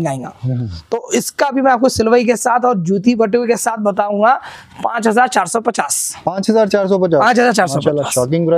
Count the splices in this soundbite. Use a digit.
0